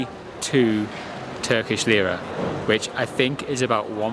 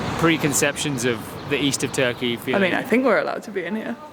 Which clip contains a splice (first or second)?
second